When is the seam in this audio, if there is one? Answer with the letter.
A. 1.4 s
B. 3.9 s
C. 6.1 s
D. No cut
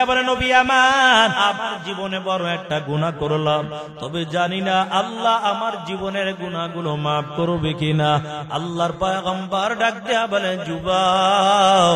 A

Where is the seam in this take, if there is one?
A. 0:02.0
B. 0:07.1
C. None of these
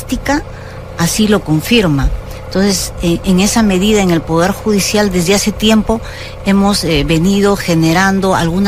A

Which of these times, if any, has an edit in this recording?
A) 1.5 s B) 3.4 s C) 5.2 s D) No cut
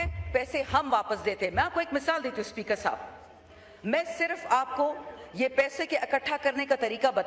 D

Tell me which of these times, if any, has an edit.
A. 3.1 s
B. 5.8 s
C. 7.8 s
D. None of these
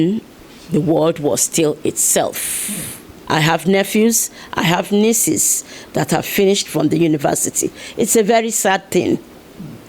A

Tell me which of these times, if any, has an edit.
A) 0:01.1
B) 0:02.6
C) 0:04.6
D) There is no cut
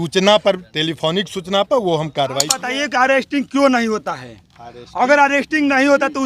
B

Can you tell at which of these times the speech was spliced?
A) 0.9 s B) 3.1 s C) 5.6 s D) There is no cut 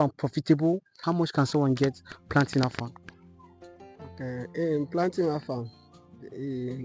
A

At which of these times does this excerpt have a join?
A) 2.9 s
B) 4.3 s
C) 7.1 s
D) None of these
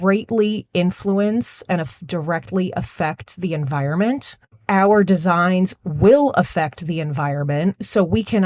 B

